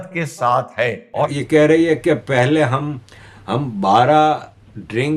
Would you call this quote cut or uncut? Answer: cut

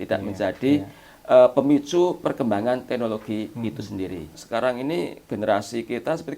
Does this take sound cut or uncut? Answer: cut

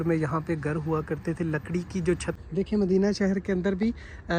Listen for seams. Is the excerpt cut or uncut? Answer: cut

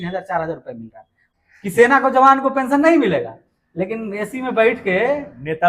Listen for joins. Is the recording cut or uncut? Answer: cut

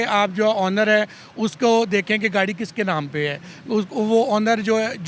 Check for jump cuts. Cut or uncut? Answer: uncut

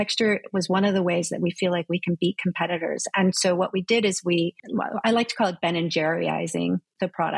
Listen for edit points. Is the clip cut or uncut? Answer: cut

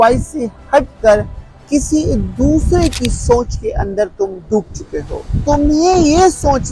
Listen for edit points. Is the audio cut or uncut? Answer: cut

